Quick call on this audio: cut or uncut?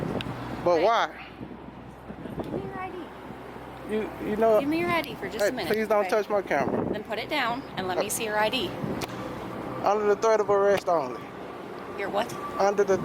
cut